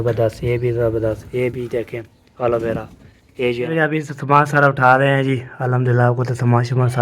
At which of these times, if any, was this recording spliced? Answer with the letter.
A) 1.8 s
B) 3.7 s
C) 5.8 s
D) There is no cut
B